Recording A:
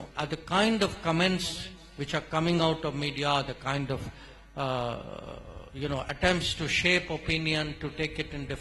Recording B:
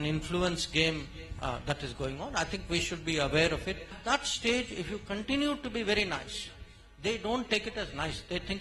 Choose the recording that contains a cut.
B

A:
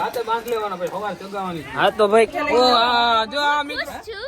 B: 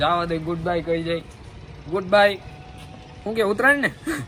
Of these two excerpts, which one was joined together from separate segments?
A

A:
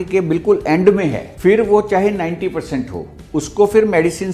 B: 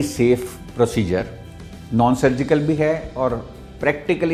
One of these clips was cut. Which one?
A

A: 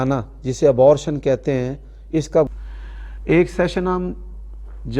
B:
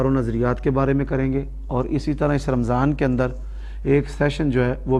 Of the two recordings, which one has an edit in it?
A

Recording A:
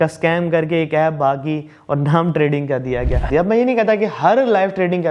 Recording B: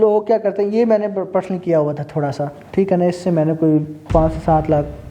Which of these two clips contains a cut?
A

